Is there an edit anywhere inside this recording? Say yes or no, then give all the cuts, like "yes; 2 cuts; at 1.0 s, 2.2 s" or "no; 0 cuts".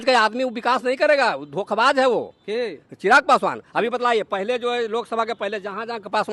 no; 0 cuts